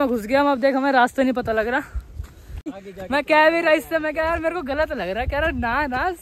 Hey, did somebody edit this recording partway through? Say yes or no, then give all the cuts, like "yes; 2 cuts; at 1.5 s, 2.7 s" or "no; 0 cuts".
yes; 1 cut; at 2.8 s